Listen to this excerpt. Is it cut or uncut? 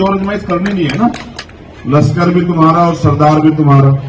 cut